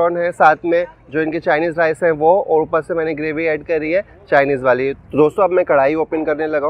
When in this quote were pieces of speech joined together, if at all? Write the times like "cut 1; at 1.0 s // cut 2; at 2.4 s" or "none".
cut 1; at 5.0 s